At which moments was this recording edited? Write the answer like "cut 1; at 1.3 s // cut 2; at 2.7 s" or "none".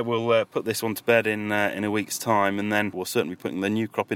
cut 1; at 3.0 s